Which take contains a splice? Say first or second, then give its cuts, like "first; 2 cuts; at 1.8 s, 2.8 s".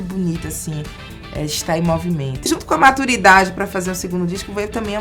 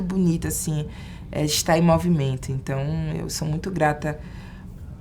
first; 1 cut; at 2.5 s